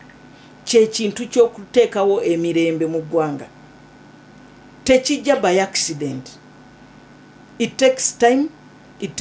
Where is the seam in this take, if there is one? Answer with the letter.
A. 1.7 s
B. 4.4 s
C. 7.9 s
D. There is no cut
D